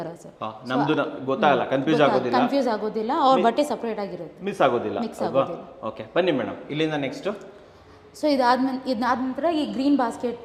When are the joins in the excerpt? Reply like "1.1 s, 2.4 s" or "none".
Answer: none

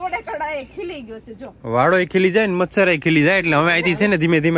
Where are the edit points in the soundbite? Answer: none

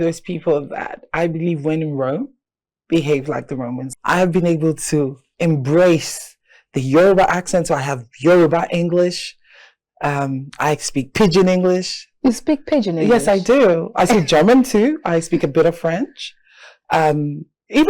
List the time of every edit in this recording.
3.9 s

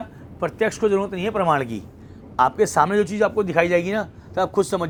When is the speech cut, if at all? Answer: none

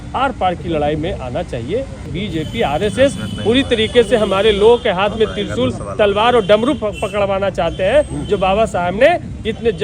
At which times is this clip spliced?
2.1 s

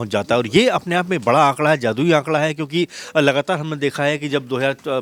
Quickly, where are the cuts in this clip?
none

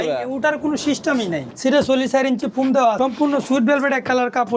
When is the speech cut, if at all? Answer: 1.4 s, 3.0 s

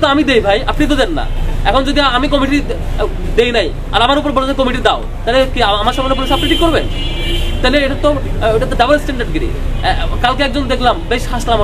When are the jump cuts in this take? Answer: none

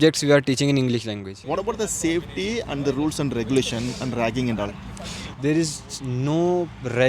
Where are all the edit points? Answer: 1.3 s

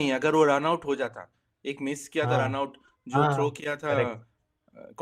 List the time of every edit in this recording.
none

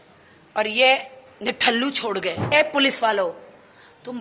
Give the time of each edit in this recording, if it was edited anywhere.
2.5 s

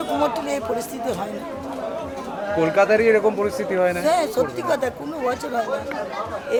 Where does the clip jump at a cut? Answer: none

